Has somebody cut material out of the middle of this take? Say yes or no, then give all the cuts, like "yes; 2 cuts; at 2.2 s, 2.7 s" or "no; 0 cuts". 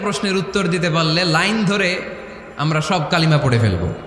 no; 0 cuts